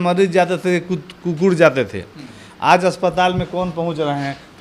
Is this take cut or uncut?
uncut